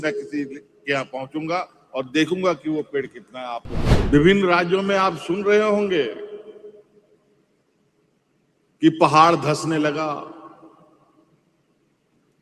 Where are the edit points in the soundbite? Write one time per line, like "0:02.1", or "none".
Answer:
0:03.9